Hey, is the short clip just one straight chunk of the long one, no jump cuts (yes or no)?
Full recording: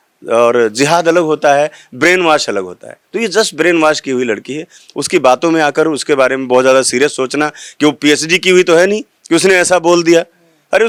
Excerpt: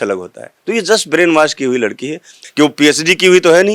no